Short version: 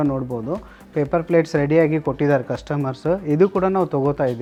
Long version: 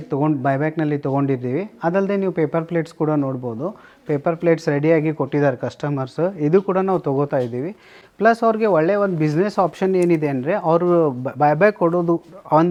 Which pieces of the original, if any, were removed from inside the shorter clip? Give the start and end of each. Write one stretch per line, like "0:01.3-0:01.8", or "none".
none